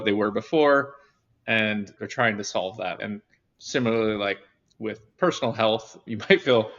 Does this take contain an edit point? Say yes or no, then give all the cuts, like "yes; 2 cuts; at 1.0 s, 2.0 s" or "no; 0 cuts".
yes; 2 cuts; at 2.0 s, 3.0 s